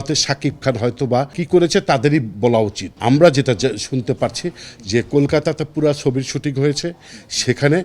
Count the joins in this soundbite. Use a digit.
2